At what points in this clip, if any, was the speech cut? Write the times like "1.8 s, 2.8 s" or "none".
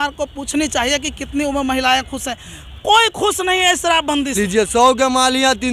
4.3 s